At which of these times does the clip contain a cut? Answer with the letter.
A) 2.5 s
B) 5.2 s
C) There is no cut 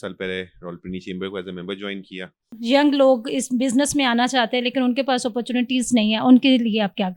A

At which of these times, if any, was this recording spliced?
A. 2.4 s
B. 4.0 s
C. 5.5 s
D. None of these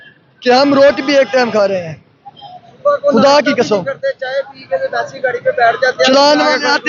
D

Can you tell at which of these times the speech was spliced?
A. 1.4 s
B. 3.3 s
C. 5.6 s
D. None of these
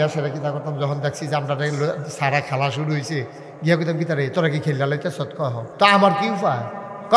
C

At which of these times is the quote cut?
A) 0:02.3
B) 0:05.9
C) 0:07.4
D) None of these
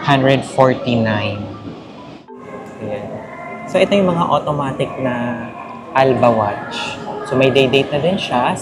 A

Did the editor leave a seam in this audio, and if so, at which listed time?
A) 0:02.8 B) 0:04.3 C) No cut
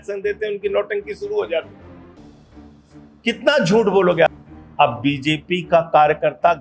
B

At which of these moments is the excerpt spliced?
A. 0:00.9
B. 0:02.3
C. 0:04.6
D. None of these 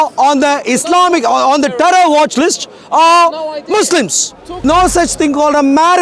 C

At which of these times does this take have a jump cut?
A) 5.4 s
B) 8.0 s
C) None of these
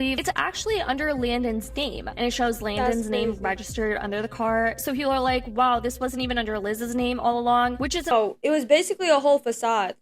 B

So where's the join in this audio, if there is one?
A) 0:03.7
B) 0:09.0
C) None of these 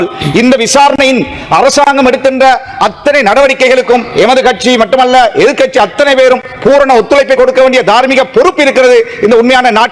C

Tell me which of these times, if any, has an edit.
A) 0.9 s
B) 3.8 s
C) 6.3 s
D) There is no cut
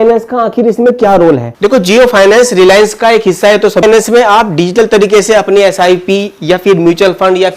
B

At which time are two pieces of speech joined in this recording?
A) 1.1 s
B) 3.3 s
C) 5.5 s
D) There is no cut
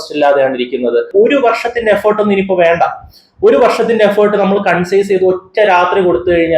A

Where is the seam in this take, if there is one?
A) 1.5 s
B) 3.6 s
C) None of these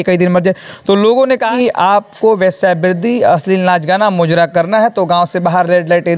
A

